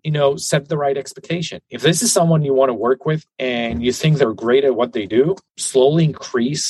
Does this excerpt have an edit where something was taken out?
yes; 2 cuts; at 3.3 s, 5.5 s

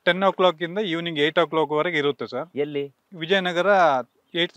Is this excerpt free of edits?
yes; 0 cuts

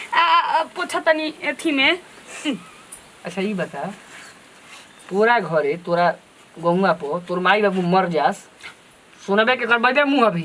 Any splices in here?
no; 0 cuts

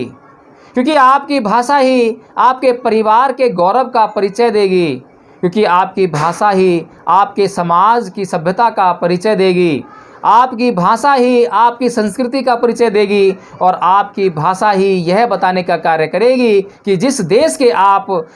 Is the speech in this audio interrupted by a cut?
no; 0 cuts

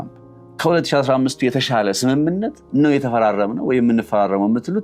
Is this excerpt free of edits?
yes; 0 cuts

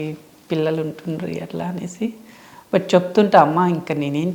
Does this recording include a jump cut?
no; 0 cuts

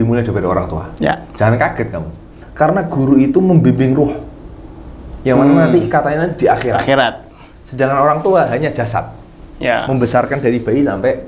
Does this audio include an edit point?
yes; 1 cut; at 2.4 s

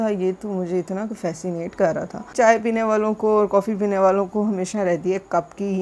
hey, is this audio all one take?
no; 1 cut; at 2.4 s

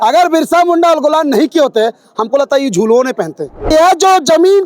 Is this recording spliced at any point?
yes; 1 cut; at 3.7 s

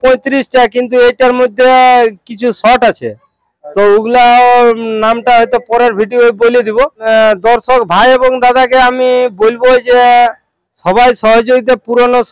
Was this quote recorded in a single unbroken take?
no; 1 cut; at 7.0 s

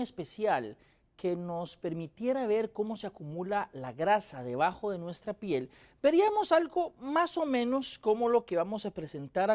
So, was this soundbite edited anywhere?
yes; 1 cut; at 6.8 s

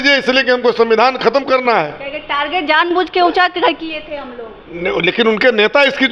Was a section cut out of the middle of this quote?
no; 0 cuts

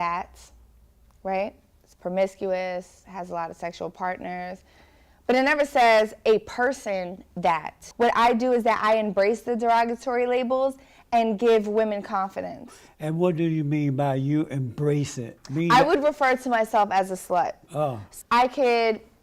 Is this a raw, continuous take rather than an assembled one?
no; 2 cuts; at 7.8 s, 18.1 s

